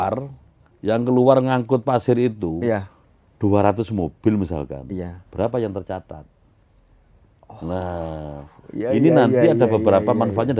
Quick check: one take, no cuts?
yes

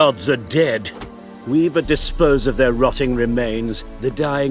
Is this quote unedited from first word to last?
yes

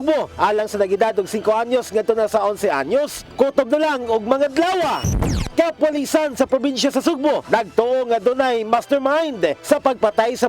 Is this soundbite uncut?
no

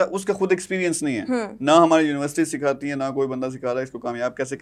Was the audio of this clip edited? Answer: no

